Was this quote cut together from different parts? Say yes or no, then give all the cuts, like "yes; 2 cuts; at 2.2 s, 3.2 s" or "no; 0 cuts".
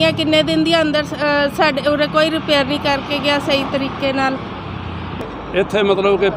yes; 1 cut; at 5.2 s